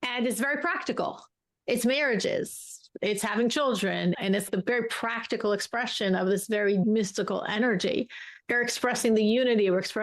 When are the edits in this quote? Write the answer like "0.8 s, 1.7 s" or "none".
4.2 s, 6.8 s, 8.4 s